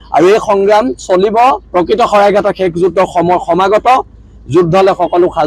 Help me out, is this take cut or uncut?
cut